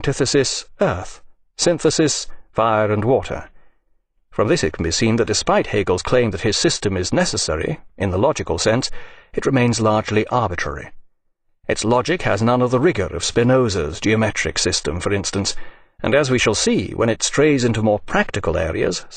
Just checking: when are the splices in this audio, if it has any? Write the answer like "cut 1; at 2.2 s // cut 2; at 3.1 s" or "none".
cut 1; at 3.7 s